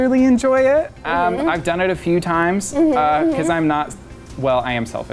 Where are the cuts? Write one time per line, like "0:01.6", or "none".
none